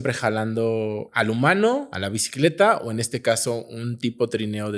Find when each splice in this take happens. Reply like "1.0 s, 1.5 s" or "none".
1.0 s, 2.0 s

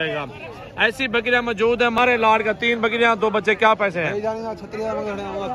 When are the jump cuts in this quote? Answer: 2.0 s

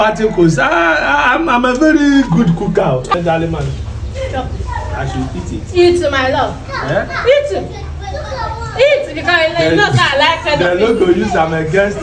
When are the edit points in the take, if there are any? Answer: 3.2 s

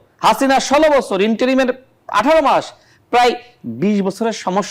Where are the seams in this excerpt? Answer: none

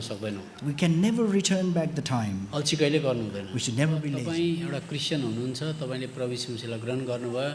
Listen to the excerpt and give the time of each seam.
4.2 s

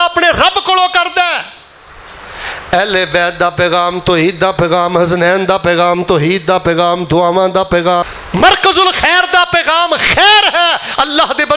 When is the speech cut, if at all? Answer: 8.0 s

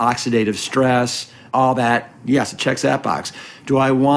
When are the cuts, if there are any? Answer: 1.4 s

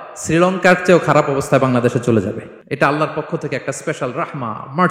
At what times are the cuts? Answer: 2.5 s

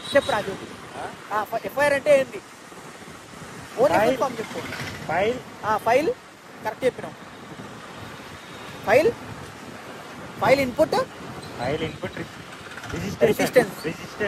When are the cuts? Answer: none

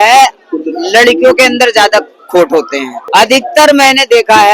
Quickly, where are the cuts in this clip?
3.0 s

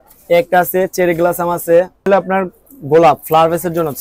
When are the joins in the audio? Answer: 2.1 s

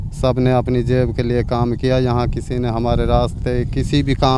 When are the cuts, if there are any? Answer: none

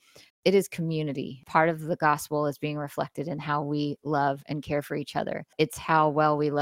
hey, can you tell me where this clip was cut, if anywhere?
1.4 s, 5.5 s

